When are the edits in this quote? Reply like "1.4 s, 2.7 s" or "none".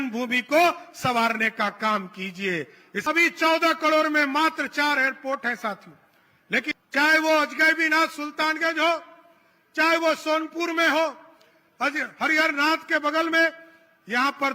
2.8 s, 6.7 s